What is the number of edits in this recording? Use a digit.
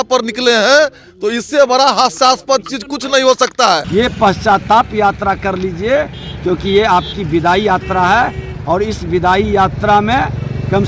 1